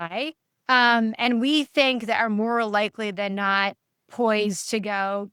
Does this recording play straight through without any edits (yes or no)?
yes